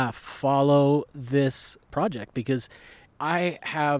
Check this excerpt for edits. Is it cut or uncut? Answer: cut